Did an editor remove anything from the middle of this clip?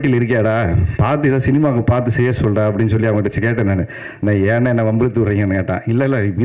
no; 0 cuts

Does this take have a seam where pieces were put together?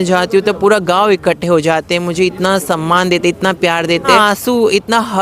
yes; 1 cut; at 4.1 s

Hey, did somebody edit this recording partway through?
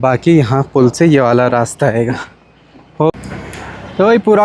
yes; 1 cut; at 3.1 s

